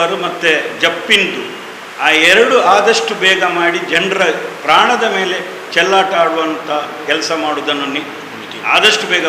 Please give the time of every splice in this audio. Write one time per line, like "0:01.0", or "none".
none